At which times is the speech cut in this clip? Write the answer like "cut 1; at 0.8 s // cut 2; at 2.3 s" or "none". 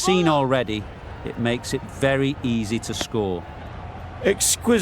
cut 1; at 3.5 s